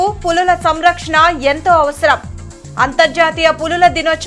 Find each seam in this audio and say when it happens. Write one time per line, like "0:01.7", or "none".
none